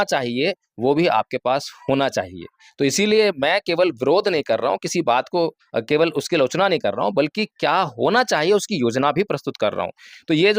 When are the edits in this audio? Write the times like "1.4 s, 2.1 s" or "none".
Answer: none